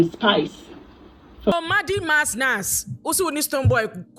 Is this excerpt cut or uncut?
cut